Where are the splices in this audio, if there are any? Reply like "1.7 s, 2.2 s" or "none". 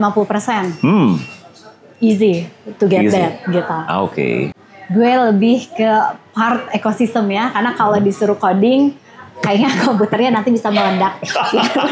4.6 s

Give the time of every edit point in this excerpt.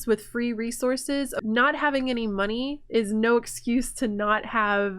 1.4 s

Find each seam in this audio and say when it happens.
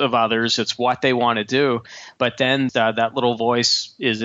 2.7 s

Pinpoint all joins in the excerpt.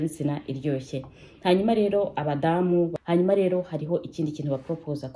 2.9 s

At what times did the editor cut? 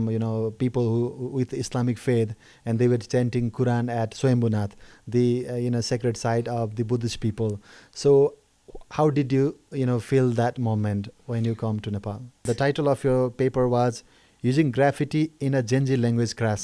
12.4 s

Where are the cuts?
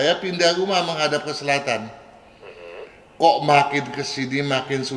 none

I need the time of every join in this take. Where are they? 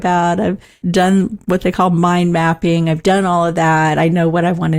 none

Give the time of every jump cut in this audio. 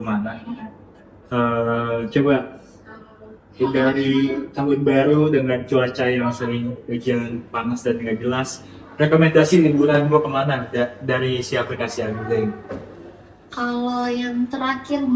none

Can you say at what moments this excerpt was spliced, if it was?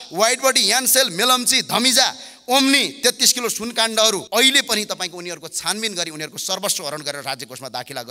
4.2 s

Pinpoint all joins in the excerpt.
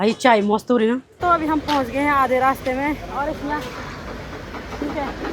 1.2 s

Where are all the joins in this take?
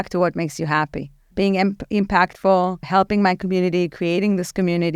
1.2 s, 2.8 s

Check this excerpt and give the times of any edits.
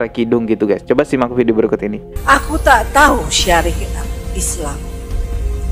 2.1 s

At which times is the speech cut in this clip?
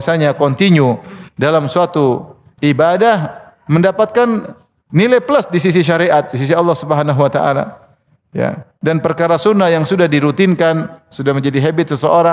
none

